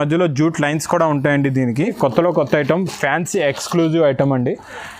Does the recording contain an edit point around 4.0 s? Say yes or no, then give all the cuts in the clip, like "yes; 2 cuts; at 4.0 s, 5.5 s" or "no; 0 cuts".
no; 1 cut; at 1.9 s